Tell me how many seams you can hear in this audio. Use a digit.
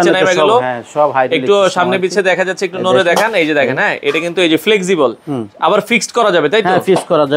0